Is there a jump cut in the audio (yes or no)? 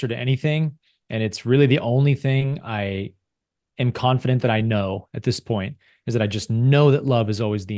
no